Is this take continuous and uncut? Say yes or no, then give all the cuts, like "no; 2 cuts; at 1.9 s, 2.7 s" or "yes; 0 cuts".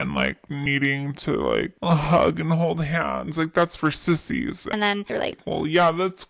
no; 1 cut; at 4.6 s